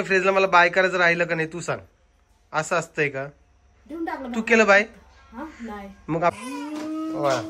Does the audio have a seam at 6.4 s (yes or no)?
yes